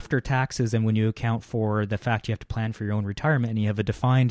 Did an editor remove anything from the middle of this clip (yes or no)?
no